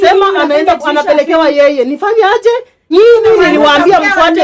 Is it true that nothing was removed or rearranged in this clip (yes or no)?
no